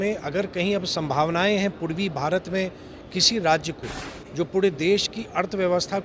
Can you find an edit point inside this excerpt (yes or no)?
no